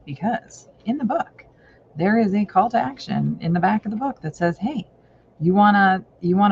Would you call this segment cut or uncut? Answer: uncut